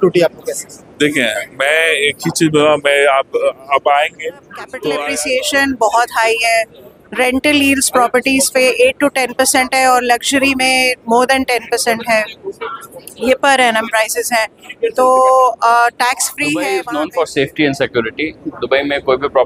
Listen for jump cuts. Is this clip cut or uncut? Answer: cut